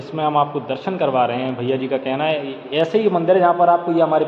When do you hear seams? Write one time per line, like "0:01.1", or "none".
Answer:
none